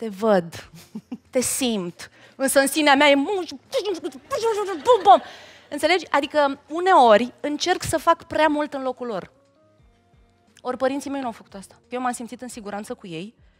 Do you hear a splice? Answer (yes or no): yes